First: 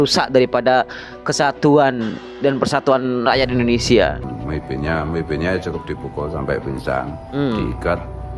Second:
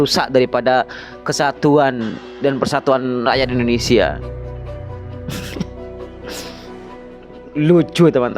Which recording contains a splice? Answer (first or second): first